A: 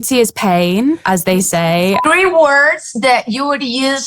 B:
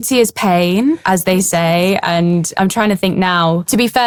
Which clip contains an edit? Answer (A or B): A